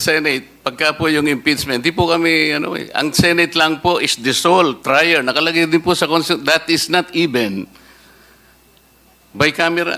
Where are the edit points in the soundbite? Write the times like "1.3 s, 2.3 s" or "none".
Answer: none